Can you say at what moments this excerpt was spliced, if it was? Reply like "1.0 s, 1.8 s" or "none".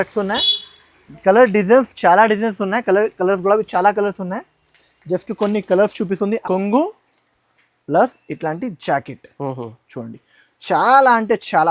6.4 s